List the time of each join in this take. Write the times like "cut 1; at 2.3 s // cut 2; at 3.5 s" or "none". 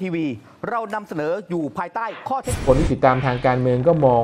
cut 1; at 2.6 s